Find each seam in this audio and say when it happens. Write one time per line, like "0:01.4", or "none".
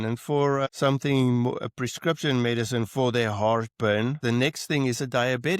0:04.2